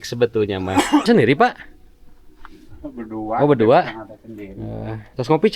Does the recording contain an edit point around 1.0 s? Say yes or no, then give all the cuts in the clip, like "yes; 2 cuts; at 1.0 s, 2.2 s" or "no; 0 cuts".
yes; 1 cut; at 1.0 s